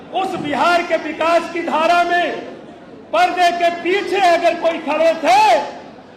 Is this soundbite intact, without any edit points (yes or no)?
yes